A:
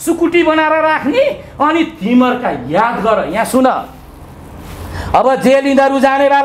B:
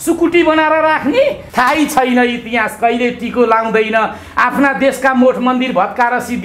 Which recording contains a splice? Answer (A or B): B